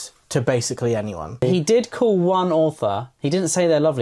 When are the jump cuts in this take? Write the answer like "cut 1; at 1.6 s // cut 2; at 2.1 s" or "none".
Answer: cut 1; at 1.4 s